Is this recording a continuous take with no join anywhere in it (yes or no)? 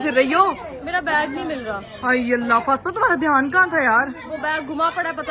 yes